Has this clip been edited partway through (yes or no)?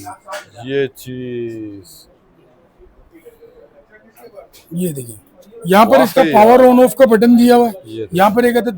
no